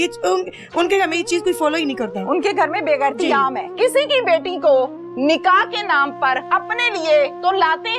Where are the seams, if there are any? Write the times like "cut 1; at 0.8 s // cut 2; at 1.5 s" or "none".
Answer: cut 1; at 3.7 s // cut 2; at 6.4 s